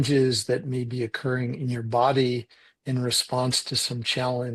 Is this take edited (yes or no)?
no